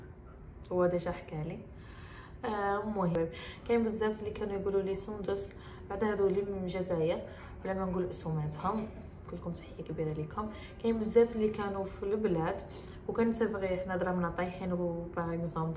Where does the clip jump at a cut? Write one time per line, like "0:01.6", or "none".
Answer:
0:03.1